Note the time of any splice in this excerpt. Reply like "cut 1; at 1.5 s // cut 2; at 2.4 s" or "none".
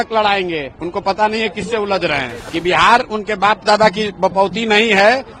cut 1; at 2.4 s